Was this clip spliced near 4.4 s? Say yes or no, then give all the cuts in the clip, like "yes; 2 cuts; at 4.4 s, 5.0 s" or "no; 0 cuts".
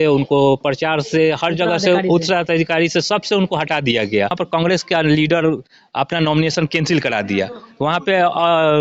yes; 1 cut; at 4.4 s